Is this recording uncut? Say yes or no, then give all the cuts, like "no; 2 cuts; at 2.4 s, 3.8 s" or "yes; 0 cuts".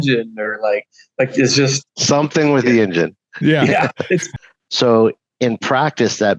no; 1 cut; at 4.3 s